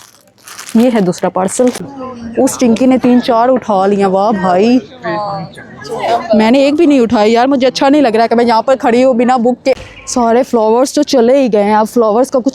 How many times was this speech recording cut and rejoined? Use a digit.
2